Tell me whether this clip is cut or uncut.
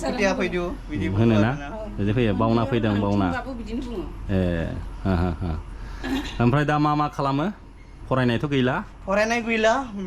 uncut